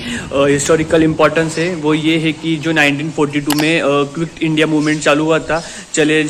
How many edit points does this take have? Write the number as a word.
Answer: zero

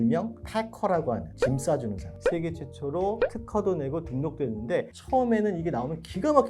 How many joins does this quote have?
one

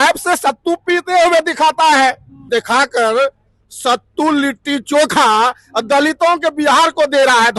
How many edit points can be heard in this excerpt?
one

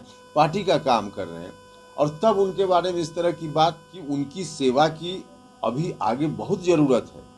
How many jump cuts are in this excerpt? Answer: one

